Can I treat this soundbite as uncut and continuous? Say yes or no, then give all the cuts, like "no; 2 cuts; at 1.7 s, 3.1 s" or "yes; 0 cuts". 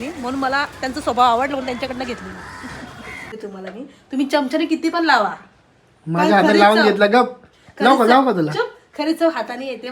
no; 1 cut; at 3.3 s